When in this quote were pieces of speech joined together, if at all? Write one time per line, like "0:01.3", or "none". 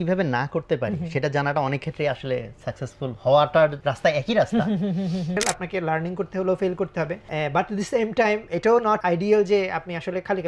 0:03.9
0:05.4
0:07.2
0:09.0